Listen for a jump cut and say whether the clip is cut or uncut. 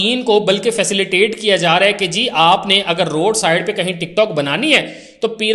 uncut